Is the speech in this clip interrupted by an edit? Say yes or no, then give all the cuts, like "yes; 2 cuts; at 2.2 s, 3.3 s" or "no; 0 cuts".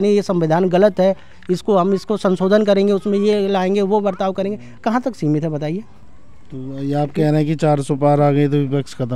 no; 0 cuts